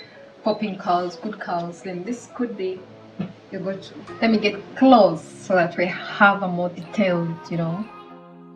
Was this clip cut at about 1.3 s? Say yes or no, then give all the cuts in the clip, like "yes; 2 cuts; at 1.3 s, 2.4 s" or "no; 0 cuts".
no; 1 cut; at 4.0 s